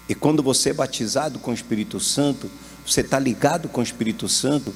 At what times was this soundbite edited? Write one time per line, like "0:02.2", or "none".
none